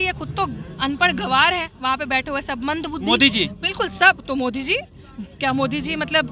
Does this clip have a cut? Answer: no; 0 cuts

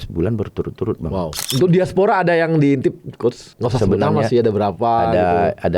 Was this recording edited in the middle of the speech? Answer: yes; 2 cuts; at 1.4 s, 3.5 s

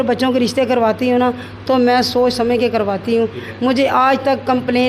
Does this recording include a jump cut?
no; 0 cuts

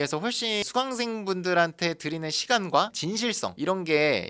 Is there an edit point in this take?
no; 0 cuts

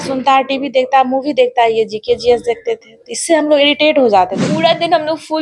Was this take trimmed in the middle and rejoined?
yes; 1 cut; at 4.4 s

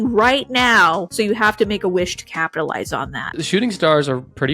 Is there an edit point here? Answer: yes; 2 cuts; at 1.1 s, 3.4 s

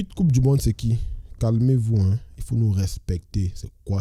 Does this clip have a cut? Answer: no; 0 cuts

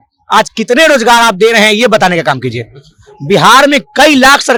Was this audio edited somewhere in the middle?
no; 0 cuts

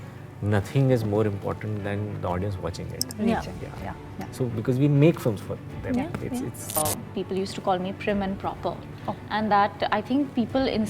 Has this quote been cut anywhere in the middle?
yes; 1 cut; at 6.8 s

